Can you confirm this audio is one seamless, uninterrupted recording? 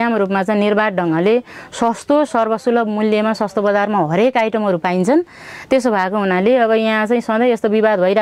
yes; 0 cuts

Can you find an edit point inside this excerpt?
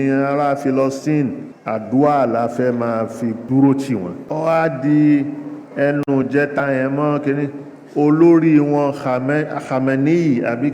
yes; 3 cuts; at 1.5 s, 3.4 s, 4.2 s

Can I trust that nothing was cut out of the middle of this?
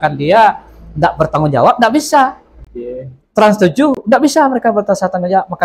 yes; 0 cuts

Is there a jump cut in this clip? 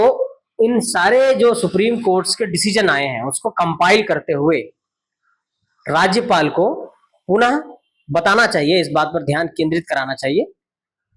no; 0 cuts

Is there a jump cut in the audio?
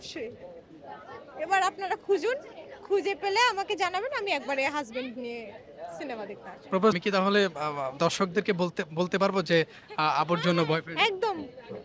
yes; 1 cut; at 7.0 s

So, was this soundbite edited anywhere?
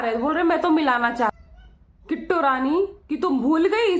yes; 1 cut; at 1.3 s

